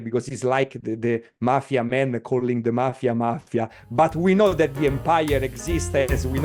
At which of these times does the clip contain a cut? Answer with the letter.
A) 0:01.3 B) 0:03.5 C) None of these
C